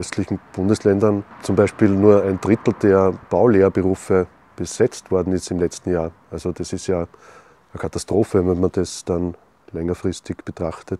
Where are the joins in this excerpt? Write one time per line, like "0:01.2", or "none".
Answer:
0:01.3
0:03.3